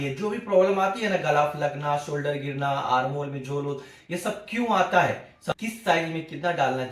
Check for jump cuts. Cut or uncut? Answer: cut